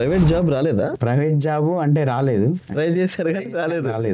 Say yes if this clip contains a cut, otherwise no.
yes